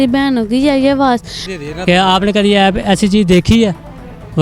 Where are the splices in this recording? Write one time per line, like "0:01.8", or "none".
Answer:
0:01.4